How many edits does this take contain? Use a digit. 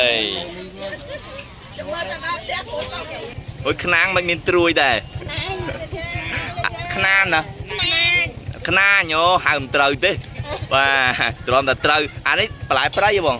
1